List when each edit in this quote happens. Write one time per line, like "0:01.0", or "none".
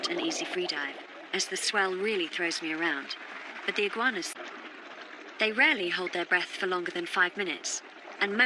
none